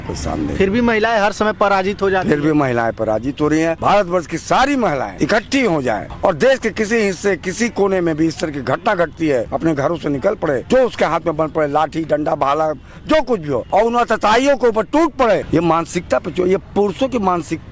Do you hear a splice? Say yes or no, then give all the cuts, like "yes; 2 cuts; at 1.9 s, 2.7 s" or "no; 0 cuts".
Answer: yes; 7 cuts; at 3.8 s, 5.1 s, 6.1 s, 9.5 s, 10.6 s, 13.6 s, 15.5 s